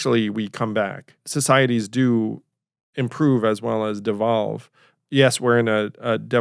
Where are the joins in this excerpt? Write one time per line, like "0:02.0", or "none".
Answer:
0:01.3